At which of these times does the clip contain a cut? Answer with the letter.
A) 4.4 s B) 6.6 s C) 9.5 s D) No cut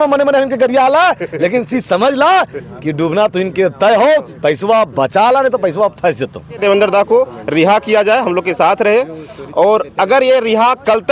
B